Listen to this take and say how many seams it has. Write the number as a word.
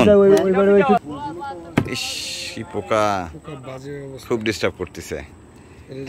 one